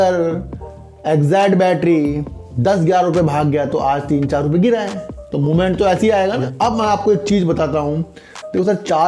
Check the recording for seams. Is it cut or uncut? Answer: cut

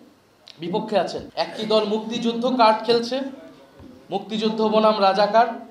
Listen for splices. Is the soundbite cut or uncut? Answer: cut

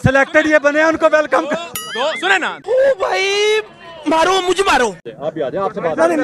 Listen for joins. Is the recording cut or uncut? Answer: cut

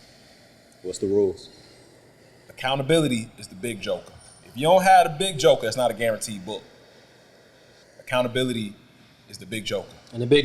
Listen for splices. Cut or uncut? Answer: cut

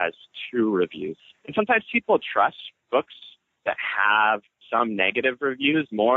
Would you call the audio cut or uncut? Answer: cut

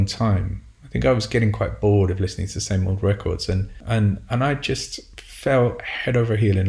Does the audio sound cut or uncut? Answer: cut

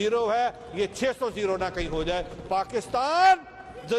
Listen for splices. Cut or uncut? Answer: uncut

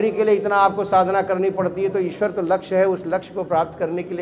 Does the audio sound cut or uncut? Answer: uncut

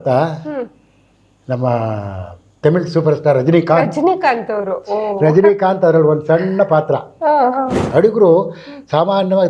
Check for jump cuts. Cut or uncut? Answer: cut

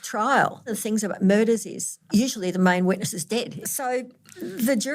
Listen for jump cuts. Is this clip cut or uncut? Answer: cut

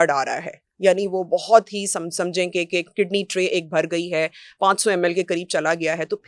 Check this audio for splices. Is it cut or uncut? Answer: uncut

